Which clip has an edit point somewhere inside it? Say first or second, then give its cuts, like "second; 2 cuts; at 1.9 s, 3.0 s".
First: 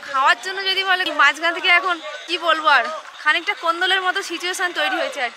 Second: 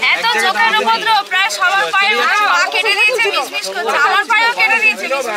first; 2 cuts; at 1.1 s, 3.1 s